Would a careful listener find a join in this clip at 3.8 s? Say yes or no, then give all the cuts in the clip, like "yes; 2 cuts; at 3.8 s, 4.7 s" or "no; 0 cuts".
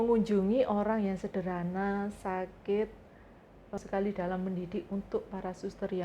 yes; 1 cut; at 3.8 s